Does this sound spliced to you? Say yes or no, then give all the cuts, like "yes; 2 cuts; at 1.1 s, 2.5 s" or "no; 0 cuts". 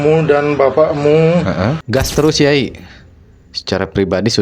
yes; 1 cut; at 1.8 s